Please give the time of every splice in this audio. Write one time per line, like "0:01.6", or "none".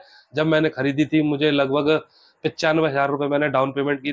none